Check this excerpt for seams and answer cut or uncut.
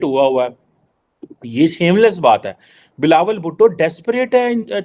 uncut